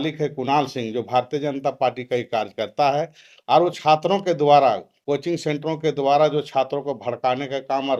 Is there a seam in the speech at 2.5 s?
no; 0 cuts

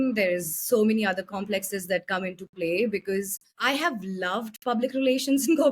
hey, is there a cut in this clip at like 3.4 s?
yes; 1 cut; at 3.4 s

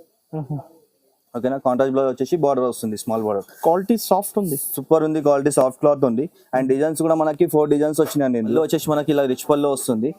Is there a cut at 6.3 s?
no; 1 cut; at 8.5 s

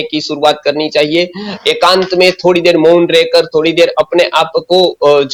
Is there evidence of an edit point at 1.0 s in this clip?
no; 0 cuts

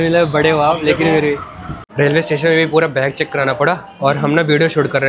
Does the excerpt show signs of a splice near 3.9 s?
no; 1 cut; at 1.9 s

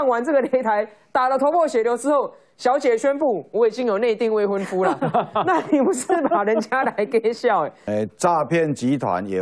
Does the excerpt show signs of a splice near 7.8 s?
yes; 1 cut; at 7.8 s

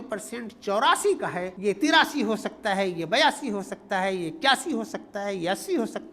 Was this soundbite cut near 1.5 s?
yes; 1 cut; at 1.5 s

